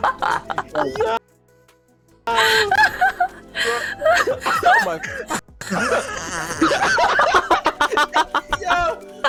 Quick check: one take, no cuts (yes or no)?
yes